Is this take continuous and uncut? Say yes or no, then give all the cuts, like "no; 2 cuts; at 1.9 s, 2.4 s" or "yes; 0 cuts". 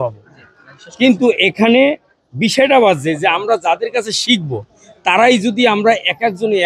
yes; 0 cuts